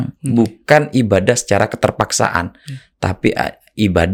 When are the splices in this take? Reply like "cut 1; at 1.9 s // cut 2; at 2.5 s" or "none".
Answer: none